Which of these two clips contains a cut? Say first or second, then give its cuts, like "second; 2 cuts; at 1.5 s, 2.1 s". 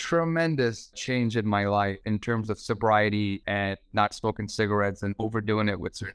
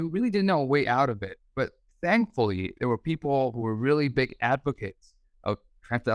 first; 4 cuts; at 1.0 s, 2.0 s, 3.4 s, 5.2 s